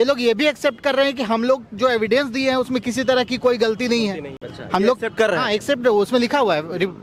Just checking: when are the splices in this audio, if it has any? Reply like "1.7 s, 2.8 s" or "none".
none

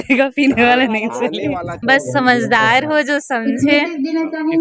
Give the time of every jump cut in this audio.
1.7 s

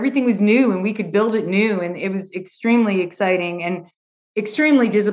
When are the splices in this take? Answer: none

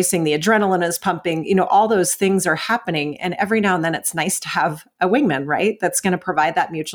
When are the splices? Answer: none

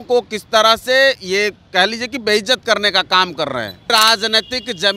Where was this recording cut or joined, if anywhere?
3.9 s

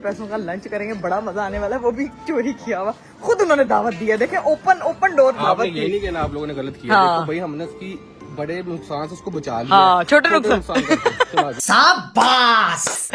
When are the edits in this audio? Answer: none

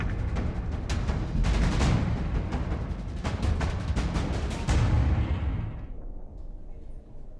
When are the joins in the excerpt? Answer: none

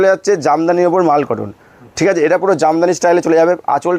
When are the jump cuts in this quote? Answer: none

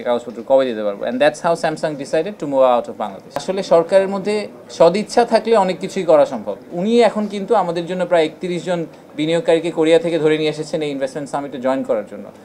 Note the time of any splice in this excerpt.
3.4 s, 6.7 s

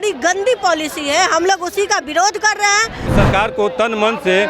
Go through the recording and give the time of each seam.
3.1 s

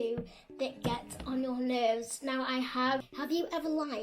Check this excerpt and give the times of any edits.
3.1 s

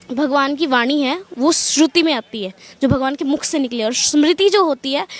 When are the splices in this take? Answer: none

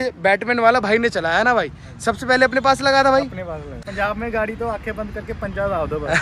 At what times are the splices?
3.7 s

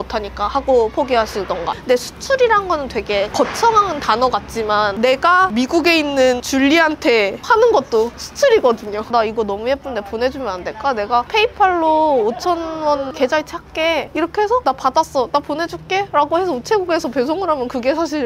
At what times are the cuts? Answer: 1.7 s, 9.0 s, 11.3 s

